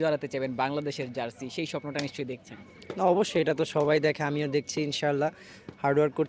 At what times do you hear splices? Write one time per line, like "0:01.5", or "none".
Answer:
none